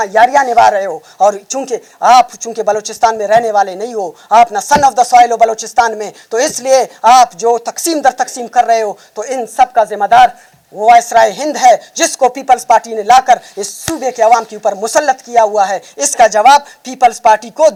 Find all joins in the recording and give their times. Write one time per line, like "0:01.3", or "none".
none